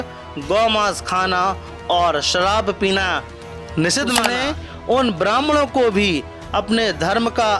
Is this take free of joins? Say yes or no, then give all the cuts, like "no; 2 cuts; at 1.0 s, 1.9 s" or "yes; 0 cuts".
no; 1 cut; at 4.3 s